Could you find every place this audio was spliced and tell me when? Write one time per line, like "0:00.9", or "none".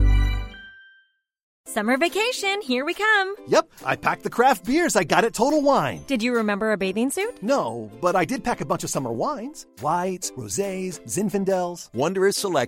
0:01.4